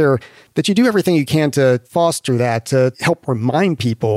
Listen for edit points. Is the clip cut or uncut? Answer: cut